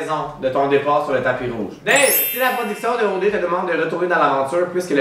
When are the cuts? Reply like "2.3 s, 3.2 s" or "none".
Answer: 1.7 s